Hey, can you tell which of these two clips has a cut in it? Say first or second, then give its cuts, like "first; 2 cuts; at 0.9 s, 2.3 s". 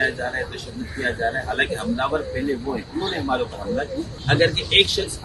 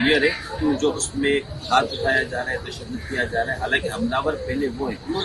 first; 1 cut; at 4.1 s